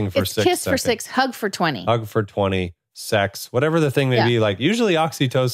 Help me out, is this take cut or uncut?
uncut